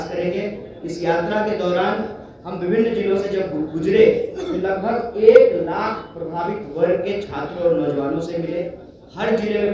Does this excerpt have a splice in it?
no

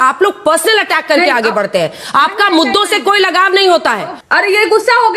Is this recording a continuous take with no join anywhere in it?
no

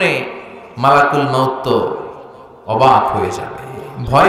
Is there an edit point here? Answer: no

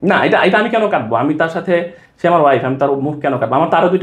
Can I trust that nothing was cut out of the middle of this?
yes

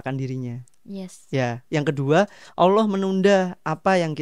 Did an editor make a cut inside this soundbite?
no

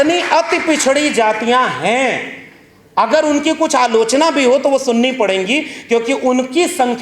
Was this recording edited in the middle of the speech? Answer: no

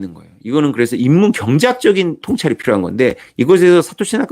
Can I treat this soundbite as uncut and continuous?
no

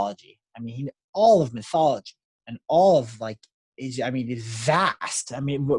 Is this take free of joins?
yes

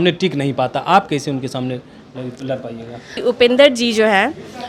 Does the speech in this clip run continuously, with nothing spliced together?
no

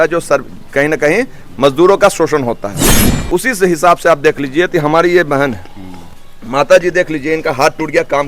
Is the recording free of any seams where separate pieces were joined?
no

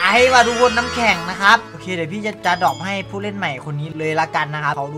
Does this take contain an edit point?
no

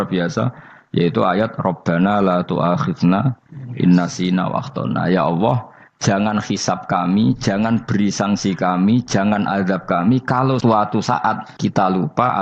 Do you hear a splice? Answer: yes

